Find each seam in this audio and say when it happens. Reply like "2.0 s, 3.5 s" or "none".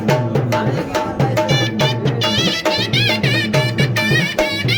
none